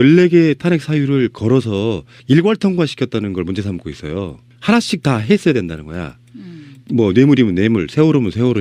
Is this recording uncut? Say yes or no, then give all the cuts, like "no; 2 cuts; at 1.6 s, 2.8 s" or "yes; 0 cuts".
no; 1 cut; at 5.3 s